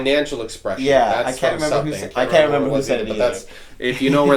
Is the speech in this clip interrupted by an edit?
no; 0 cuts

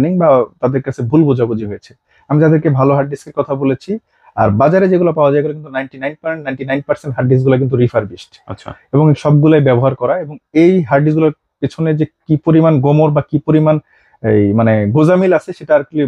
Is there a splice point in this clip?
no; 0 cuts

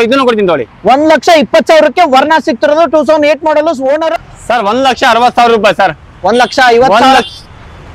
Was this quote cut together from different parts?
yes; 1 cut; at 4.1 s

